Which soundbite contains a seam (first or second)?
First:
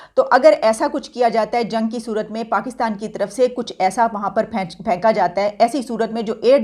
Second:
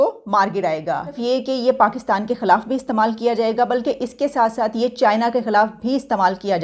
second